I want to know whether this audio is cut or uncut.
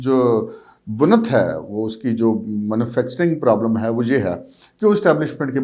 uncut